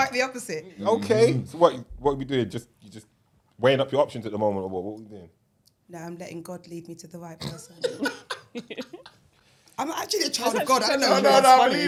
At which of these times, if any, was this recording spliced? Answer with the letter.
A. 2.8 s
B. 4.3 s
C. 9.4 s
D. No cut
D